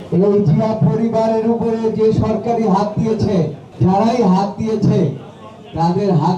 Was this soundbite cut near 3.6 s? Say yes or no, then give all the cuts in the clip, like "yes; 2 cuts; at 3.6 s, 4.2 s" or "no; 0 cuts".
yes; 1 cut; at 3.6 s